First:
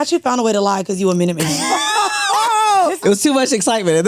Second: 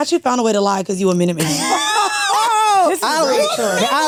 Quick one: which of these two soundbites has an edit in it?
first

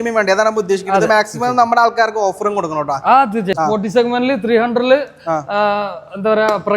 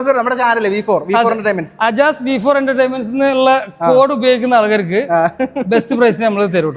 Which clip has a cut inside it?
first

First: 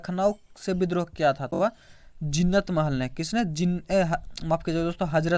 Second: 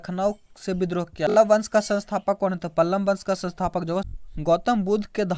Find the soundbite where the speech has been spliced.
second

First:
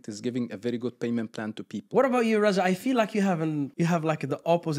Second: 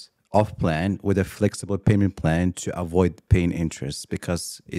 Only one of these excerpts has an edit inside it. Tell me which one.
first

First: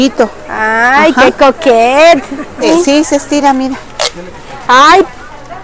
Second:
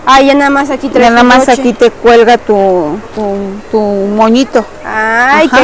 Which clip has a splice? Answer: first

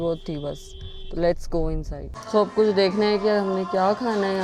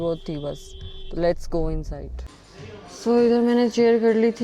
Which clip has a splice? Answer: second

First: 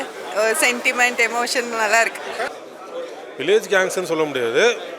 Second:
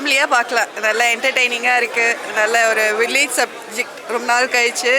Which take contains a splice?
first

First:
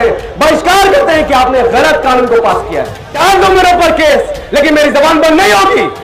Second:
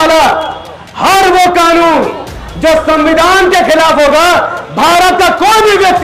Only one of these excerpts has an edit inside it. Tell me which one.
first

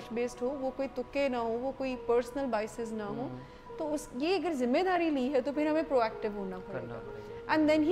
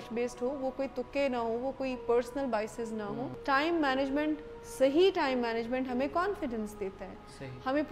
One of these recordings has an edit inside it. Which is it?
second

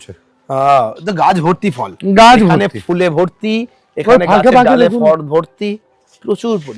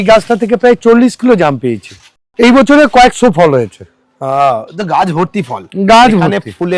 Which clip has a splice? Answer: second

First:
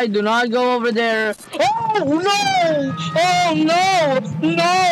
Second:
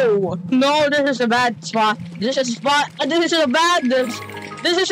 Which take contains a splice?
first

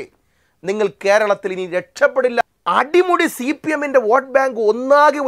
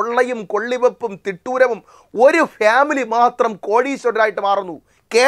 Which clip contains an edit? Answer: first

